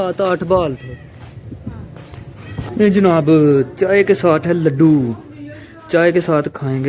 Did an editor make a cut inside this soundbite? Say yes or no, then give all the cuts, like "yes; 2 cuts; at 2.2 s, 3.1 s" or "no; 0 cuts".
yes; 1 cut; at 2.7 s